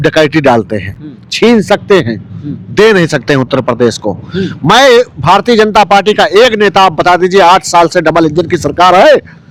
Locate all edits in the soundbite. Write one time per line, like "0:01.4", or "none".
none